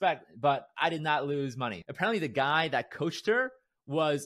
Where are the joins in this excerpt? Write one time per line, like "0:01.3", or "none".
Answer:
0:01.8